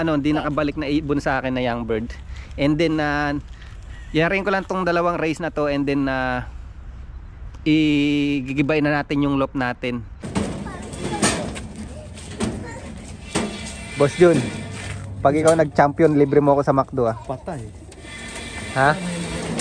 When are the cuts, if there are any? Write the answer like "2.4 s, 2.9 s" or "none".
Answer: 10.2 s